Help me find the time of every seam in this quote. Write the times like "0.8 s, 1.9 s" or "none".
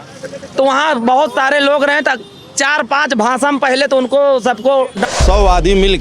5.0 s